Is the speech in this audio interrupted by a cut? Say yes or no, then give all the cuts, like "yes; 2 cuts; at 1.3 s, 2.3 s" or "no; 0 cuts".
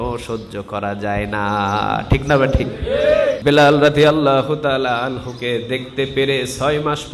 yes; 1 cut; at 3.4 s